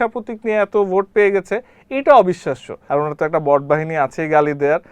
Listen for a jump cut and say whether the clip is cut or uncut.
cut